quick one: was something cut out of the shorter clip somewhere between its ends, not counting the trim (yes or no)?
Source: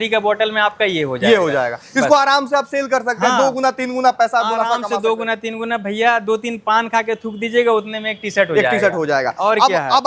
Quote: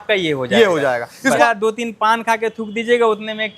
yes